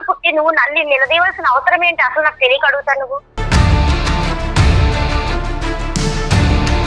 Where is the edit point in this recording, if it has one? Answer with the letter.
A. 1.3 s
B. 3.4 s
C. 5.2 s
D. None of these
B